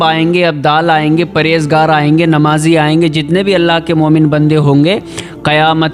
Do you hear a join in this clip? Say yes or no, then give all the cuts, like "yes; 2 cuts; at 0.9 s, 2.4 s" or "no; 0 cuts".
no; 0 cuts